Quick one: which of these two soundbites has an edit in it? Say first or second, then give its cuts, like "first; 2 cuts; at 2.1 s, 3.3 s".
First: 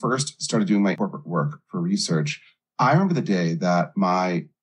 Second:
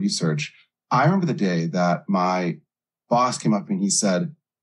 first; 1 cut; at 1.0 s